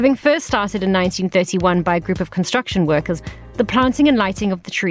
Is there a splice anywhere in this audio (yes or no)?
yes